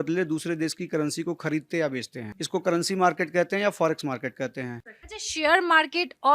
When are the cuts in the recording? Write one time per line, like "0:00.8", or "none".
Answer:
0:04.7